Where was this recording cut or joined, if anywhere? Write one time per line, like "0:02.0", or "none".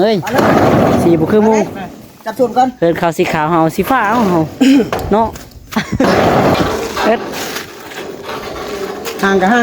0:06.5